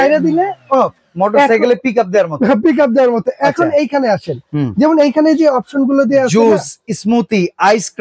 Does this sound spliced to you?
no; 0 cuts

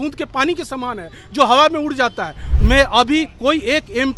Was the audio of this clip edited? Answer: yes; 1 cut; at 2.4 s

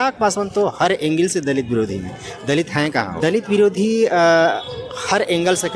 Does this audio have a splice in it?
no; 0 cuts

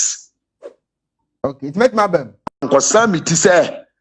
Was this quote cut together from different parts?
yes; 1 cut; at 2.7 s

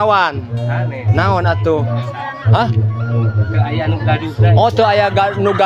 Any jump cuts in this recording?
no; 0 cuts

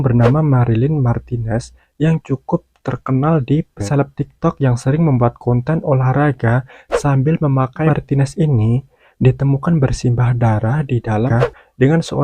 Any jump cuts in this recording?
yes; 3 cuts; at 3.8 s, 7.9 s, 11.3 s

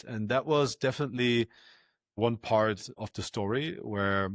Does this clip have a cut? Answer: yes; 2 cuts; at 2.2 s, 3.0 s

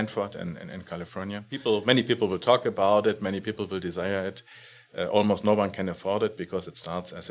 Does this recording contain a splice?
yes; 1 cut; at 1.6 s

